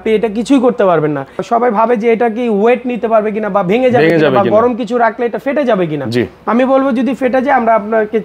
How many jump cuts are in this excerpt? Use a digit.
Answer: 1